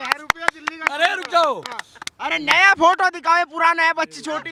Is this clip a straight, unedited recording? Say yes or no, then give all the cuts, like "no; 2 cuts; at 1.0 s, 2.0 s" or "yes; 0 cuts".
yes; 0 cuts